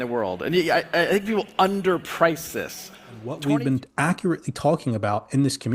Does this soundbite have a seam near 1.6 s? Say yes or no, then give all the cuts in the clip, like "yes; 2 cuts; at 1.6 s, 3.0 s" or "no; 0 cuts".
no; 1 cut; at 3.2 s